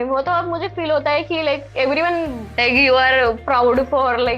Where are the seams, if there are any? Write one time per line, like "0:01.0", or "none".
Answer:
0:02.4